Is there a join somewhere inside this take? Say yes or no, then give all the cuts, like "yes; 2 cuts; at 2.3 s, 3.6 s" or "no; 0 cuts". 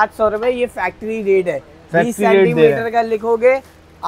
no; 0 cuts